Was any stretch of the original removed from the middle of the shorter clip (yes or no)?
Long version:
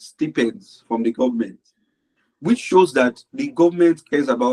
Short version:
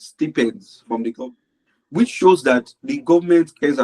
yes